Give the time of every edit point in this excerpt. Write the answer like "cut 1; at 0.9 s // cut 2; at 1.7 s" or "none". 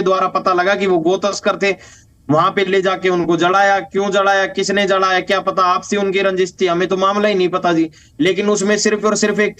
none